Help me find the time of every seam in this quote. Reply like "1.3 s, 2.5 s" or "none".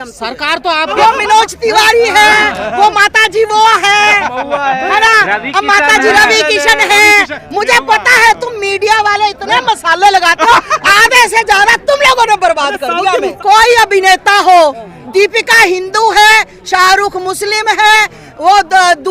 0.9 s, 13.3 s